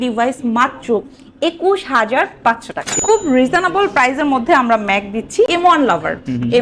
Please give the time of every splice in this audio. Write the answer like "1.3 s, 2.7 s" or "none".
2.8 s, 5.5 s

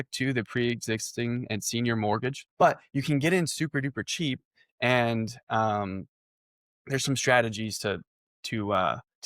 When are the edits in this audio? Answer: 2.4 s

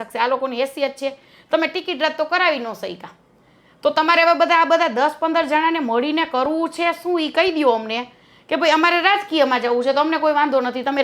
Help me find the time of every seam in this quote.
none

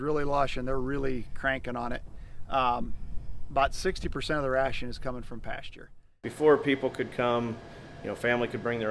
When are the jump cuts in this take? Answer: 6.0 s

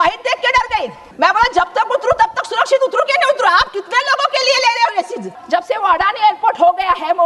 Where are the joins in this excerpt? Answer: 1.0 s, 5.4 s

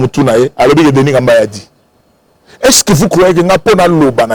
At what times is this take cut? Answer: none

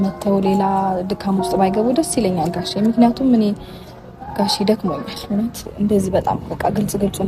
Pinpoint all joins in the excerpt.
5.7 s

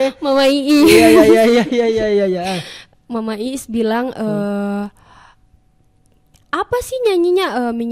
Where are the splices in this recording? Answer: none

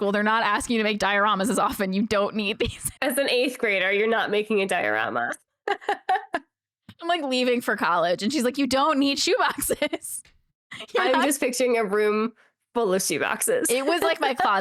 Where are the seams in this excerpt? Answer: 3.0 s

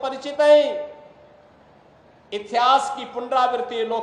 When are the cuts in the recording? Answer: none

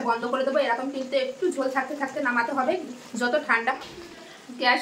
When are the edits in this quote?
3.8 s

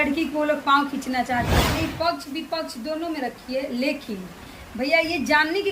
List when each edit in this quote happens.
1.6 s

